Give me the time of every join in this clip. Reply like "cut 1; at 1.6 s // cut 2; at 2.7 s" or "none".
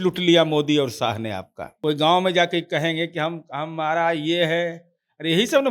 cut 1; at 1.9 s